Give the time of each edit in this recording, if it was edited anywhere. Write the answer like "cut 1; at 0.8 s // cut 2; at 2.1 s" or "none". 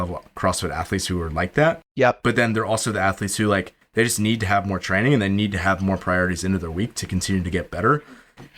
none